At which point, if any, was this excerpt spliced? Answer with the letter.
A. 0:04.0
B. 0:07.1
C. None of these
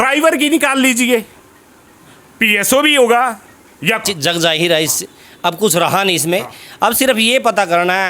A